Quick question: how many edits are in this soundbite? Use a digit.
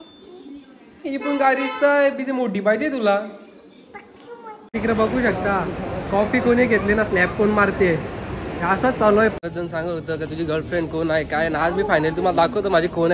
2